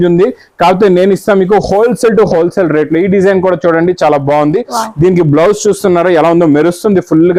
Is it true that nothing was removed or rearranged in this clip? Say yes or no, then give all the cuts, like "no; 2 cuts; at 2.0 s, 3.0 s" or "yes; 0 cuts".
yes; 0 cuts